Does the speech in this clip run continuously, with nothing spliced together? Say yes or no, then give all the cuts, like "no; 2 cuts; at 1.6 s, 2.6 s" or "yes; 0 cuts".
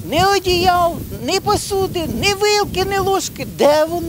yes; 0 cuts